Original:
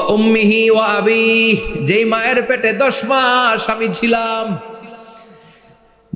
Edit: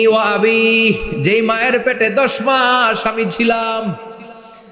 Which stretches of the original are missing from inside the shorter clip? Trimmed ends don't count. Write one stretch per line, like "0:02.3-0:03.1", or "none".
none